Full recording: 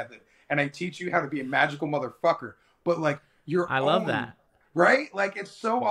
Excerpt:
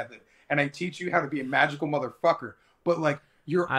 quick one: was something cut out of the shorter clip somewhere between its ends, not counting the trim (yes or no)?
no